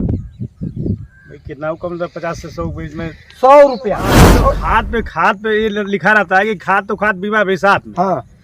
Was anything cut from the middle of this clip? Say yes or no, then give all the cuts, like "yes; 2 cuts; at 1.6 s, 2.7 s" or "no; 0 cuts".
yes; 1 cut; at 4.3 s